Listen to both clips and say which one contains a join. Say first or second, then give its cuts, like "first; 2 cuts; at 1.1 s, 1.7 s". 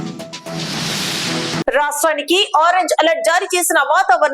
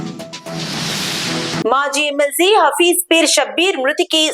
second; 1 cut; at 1.6 s